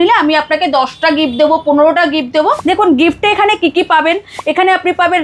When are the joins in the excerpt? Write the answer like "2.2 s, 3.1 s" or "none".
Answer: 2.6 s